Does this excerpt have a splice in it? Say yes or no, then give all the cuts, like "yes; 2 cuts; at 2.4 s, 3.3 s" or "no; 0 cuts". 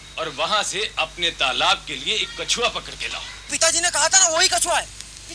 yes; 1 cut; at 3.5 s